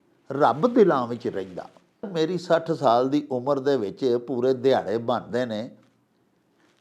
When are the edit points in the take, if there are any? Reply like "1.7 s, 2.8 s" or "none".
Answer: 2.1 s